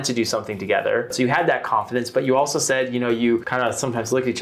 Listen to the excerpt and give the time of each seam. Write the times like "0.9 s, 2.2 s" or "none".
1.1 s, 3.5 s